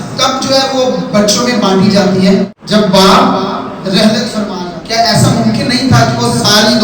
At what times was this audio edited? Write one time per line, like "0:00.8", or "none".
0:02.6
0:04.6